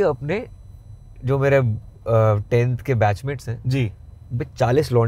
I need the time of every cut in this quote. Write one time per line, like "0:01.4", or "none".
none